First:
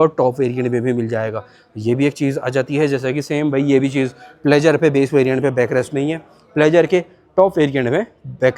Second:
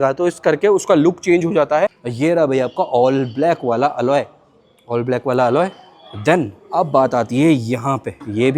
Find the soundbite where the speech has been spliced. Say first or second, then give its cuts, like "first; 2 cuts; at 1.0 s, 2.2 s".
second; 1 cut; at 2.0 s